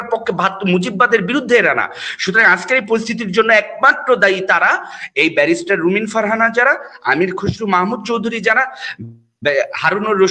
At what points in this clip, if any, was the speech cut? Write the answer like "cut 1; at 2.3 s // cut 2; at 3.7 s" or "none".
none